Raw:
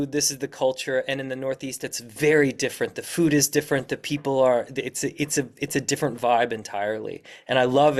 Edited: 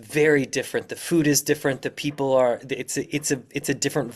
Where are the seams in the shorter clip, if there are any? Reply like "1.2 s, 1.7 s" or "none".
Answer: none